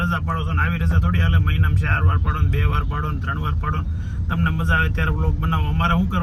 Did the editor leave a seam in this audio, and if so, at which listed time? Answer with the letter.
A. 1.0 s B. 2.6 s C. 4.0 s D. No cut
D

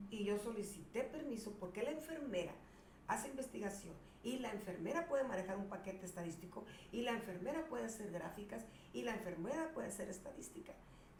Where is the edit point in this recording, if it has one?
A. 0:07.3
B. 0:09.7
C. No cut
C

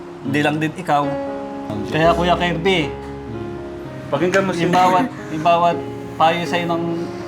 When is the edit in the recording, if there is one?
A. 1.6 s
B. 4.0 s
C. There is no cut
A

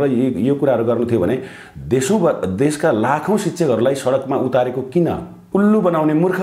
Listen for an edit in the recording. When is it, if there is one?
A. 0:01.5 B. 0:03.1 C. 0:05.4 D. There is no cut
C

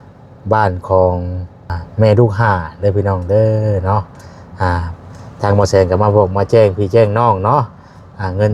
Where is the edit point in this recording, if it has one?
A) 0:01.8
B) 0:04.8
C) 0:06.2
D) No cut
A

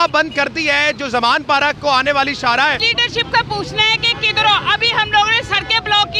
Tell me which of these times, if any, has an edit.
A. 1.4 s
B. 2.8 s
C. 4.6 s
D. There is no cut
B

